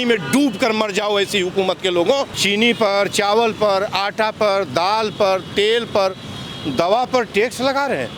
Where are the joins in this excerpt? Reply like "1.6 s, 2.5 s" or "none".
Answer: 2.4 s